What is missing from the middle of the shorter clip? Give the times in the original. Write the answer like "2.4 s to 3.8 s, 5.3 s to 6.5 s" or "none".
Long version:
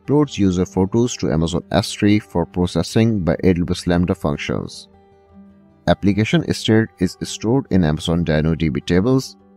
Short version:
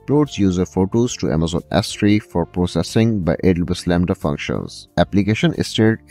4.8 s to 5.7 s